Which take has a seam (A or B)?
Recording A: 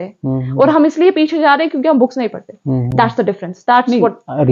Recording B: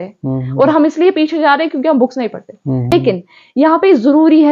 B